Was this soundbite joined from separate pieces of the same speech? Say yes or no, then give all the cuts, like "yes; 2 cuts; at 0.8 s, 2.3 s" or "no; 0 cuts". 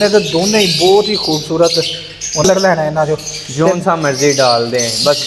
yes; 1 cut; at 2.4 s